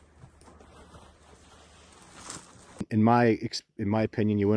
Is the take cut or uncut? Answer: cut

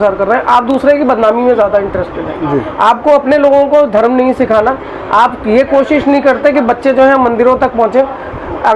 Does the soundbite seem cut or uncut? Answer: uncut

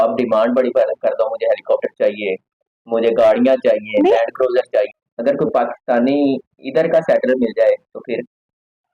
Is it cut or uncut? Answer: cut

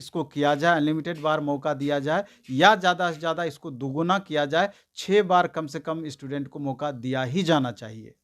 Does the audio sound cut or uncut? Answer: uncut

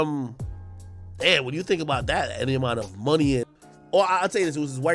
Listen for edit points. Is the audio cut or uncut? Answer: cut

